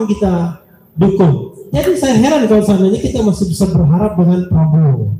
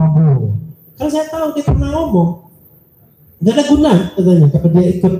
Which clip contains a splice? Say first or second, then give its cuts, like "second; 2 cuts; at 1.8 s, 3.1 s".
first; 1 cut; at 1.5 s